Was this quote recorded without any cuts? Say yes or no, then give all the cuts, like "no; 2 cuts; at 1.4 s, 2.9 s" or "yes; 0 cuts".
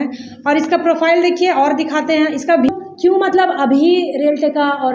no; 1 cut; at 2.7 s